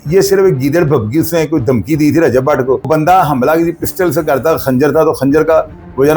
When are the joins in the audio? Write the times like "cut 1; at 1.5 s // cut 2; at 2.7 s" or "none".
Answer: cut 1; at 2.9 s

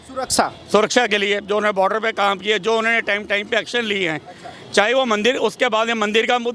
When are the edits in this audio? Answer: none

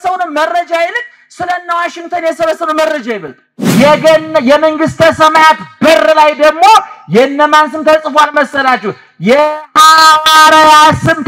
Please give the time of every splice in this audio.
cut 1; at 3.6 s

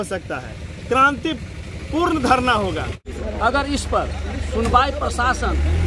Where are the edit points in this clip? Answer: cut 1; at 3.0 s

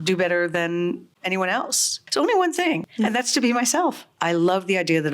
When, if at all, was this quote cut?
cut 1; at 2.0 s // cut 2; at 2.9 s // cut 3; at 4.1 s

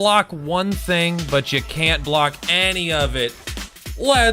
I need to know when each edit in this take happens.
none

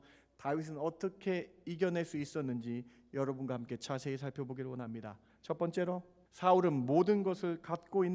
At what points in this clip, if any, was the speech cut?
cut 1; at 5.3 s // cut 2; at 6.2 s

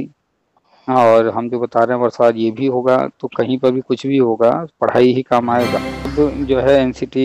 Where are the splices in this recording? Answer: cut 1; at 6.1 s

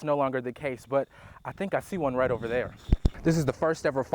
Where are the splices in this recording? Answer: cut 1; at 3.1 s

